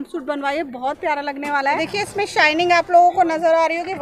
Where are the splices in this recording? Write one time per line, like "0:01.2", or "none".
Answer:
0:01.8